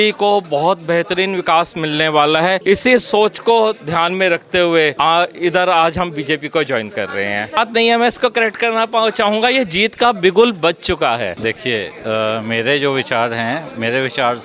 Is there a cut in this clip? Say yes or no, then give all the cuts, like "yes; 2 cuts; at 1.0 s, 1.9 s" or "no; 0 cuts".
yes; 4 cuts; at 2.6 s, 4.9 s, 7.6 s, 11.3 s